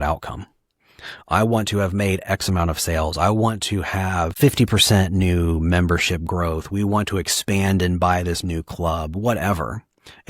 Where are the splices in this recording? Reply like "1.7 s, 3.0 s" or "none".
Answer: 4.3 s